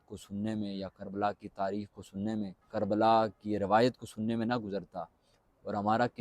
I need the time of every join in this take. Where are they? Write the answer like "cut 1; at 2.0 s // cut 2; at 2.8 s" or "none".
cut 1; at 2.6 s

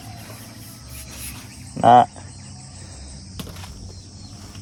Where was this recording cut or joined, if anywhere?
none

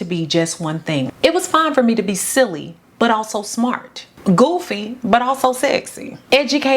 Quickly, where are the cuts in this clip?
cut 1; at 1.1 s

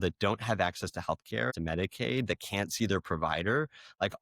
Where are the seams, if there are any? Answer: cut 1; at 1.6 s

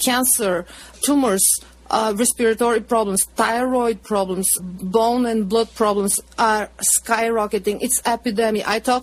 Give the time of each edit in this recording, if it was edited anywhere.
none

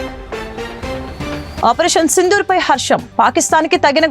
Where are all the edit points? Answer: cut 1; at 1.5 s

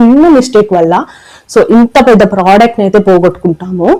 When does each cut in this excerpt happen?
none

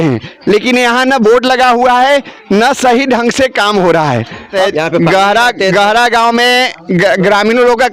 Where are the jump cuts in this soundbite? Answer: cut 1; at 4.5 s

